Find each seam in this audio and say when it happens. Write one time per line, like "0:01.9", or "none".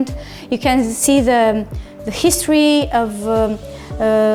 none